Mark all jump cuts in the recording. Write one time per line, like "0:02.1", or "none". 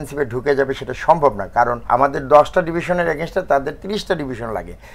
0:01.8